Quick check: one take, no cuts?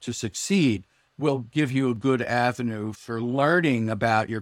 no; 1 cut; at 3.0 s

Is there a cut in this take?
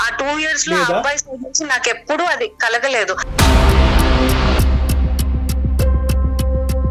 yes; 1 cut; at 3.2 s

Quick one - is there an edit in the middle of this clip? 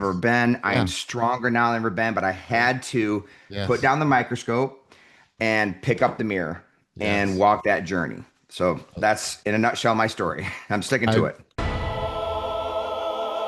yes; 1 cut; at 11.5 s

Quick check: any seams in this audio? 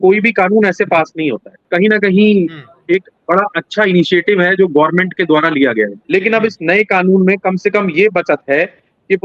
yes; 2 cuts; at 1.5 s, 6.0 s

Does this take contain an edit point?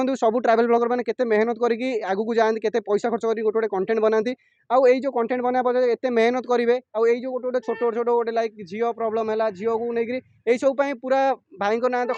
no; 0 cuts

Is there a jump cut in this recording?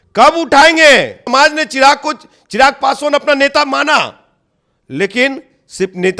yes; 1 cut; at 1.2 s

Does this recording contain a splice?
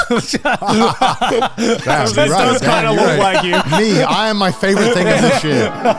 no; 0 cuts

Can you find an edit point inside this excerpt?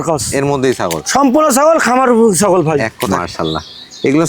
yes; 1 cut; at 3.0 s

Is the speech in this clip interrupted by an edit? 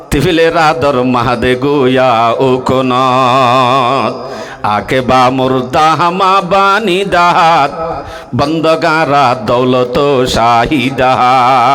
no; 0 cuts

